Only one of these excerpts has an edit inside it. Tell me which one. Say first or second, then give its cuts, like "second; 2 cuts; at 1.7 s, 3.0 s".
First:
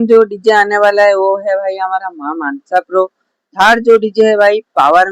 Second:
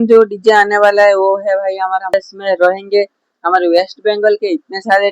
second; 1 cut; at 2.1 s